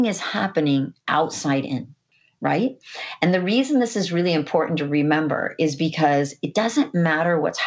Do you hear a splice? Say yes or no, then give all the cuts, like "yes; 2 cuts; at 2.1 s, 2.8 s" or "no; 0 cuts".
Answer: yes; 1 cut; at 2.0 s